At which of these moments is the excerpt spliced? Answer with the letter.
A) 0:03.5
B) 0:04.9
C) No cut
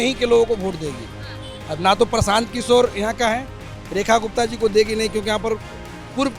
C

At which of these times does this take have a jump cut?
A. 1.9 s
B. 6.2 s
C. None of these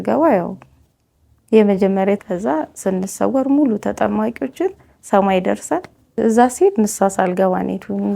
B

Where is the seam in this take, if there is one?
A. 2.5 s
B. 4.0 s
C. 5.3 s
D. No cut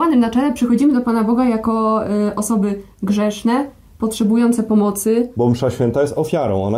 C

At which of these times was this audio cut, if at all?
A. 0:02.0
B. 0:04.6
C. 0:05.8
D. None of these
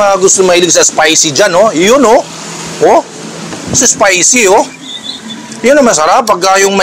D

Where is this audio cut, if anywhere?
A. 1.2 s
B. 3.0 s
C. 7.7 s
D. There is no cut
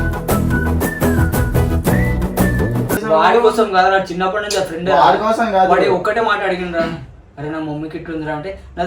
B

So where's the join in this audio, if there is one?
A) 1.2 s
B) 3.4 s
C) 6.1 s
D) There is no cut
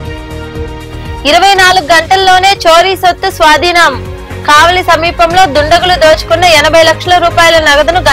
A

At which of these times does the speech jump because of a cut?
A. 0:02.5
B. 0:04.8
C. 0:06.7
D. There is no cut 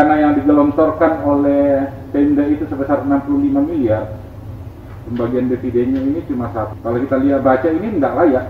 C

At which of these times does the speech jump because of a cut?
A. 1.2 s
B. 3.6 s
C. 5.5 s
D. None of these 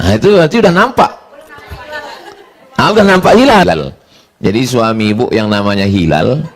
B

